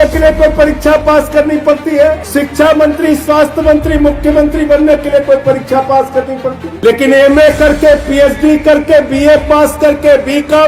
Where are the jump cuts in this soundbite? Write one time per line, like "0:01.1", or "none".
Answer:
0:02.2
0:06.7